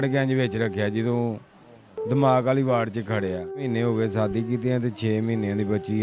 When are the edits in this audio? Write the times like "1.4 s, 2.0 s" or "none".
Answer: 3.6 s